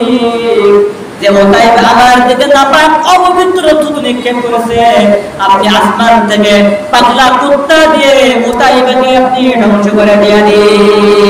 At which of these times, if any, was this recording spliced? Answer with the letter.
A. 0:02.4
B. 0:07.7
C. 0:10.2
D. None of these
D